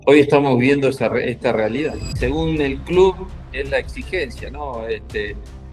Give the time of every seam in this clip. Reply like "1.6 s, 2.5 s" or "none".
2.1 s